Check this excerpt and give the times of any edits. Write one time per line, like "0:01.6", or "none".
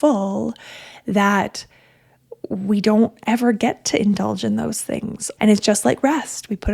0:05.2